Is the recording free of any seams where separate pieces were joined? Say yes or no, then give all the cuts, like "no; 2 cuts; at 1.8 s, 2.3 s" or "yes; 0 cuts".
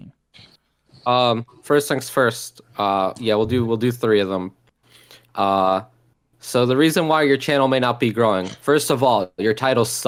yes; 0 cuts